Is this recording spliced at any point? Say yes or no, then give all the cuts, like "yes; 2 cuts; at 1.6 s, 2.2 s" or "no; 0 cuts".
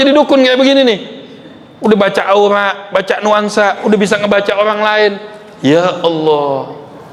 no; 0 cuts